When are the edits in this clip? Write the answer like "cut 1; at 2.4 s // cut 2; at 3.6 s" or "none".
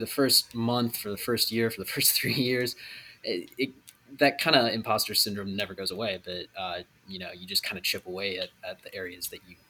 none